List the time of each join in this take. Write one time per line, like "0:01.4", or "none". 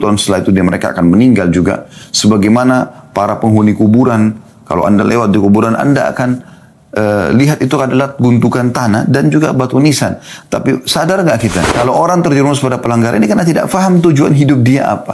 0:11.7